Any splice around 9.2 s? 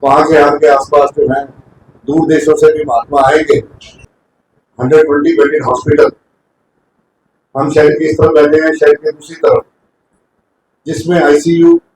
no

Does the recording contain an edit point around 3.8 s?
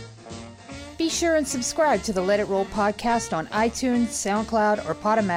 no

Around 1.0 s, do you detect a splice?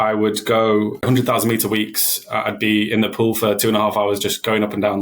yes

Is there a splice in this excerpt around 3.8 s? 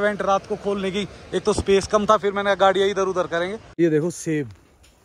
yes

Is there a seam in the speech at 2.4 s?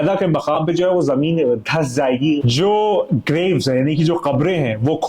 yes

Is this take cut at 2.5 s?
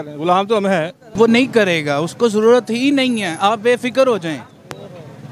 no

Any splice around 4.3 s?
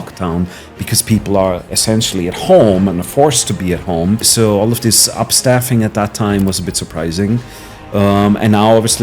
yes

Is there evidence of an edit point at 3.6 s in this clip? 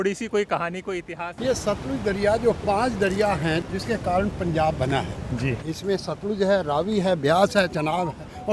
yes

